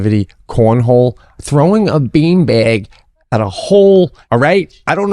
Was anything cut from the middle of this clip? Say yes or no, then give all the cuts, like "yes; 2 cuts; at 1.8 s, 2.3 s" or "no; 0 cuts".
yes; 2 cuts; at 1.3 s, 4.2 s